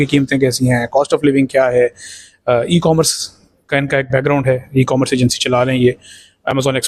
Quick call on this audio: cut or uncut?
uncut